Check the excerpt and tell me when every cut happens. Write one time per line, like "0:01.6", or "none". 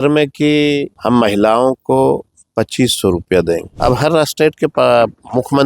0:00.9
0:03.7
0:04.7